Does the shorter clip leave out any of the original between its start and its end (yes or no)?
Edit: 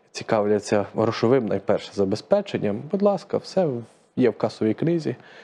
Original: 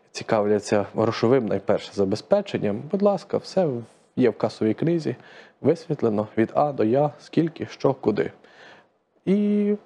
no